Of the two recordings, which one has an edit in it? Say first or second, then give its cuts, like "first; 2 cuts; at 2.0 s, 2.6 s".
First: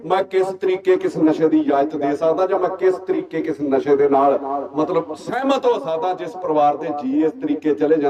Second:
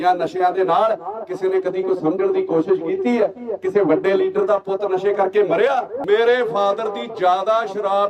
second; 1 cut; at 5.9 s